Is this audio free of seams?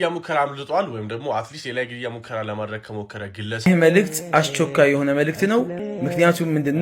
no; 2 cuts; at 3.7 s, 5.7 s

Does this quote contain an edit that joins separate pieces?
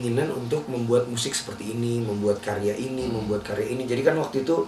no; 0 cuts

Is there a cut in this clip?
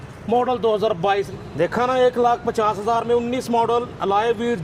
yes; 1 cut; at 1.3 s

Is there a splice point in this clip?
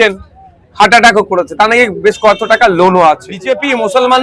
yes; 1 cut; at 3.3 s

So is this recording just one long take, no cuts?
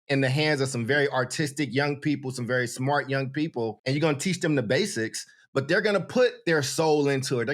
no; 1 cut; at 3.8 s

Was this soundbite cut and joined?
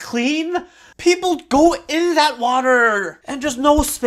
yes; 1 cut; at 3.1 s

